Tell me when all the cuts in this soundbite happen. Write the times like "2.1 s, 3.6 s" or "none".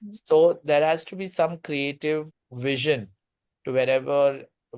2.4 s